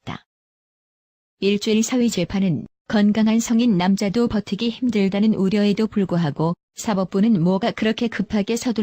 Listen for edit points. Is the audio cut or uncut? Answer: cut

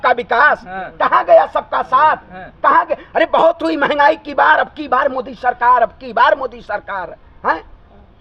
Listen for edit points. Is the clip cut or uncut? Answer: uncut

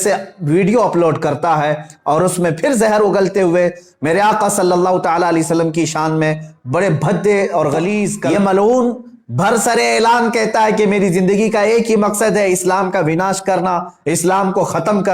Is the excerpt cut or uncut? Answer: cut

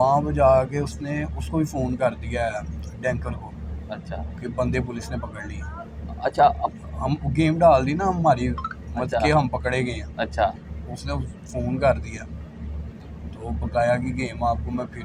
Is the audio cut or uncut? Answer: uncut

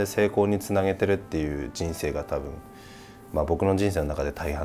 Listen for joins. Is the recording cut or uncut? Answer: uncut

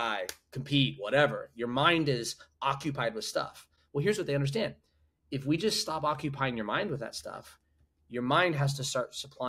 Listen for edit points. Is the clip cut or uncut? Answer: uncut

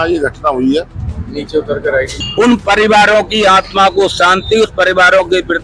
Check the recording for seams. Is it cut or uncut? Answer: cut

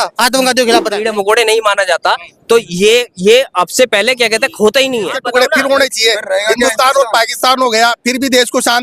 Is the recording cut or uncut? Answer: cut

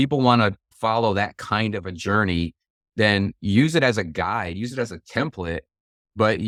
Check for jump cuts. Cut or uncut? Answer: uncut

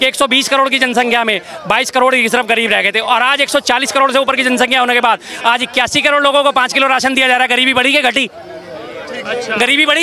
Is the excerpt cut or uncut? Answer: uncut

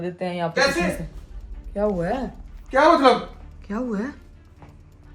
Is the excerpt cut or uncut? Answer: uncut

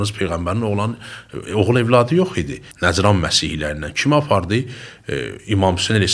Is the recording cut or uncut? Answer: cut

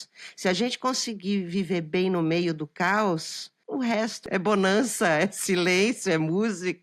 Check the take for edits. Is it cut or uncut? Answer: uncut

